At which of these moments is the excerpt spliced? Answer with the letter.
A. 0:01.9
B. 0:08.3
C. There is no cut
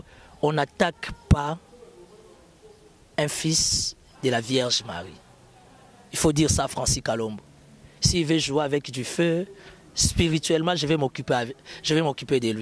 C